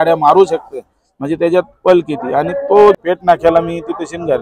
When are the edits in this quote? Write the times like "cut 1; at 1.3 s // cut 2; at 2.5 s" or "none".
cut 1; at 2.9 s